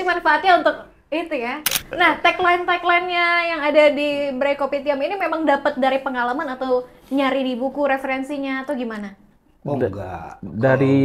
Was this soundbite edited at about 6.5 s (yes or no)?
no